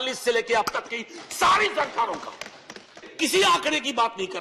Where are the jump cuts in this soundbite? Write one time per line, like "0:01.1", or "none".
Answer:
0:03.1